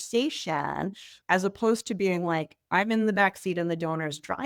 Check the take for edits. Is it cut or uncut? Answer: uncut